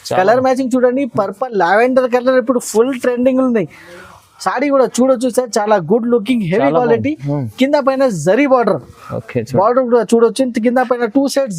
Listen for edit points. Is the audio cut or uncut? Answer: uncut